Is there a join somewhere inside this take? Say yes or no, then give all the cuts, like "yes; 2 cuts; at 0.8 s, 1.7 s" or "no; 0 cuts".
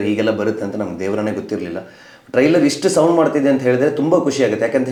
no; 0 cuts